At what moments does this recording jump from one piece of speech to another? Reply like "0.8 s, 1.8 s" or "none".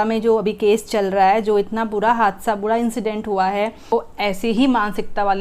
3.9 s